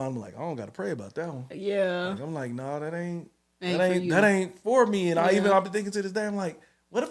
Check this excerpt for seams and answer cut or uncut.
uncut